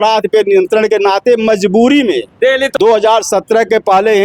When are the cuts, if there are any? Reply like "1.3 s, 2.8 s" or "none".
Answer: 2.7 s